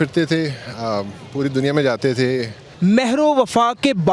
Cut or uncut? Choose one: cut